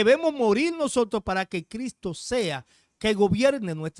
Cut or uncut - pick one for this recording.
uncut